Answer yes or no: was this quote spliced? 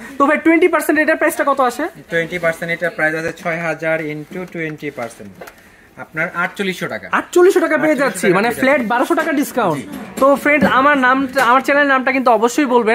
no